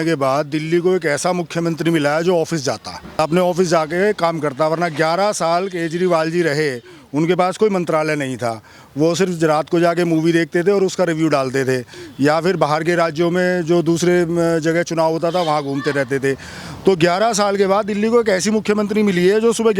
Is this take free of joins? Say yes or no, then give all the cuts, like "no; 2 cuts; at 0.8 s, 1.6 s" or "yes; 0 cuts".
no; 1 cut; at 3.1 s